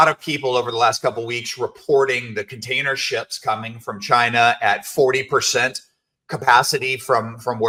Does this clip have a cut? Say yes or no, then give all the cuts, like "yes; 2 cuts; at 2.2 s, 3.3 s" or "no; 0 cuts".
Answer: no; 0 cuts